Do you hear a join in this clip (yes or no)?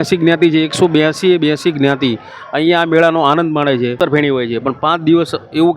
yes